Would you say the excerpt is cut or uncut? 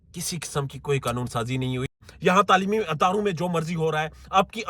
cut